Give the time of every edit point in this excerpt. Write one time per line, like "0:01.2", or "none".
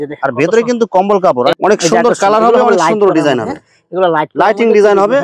0:01.6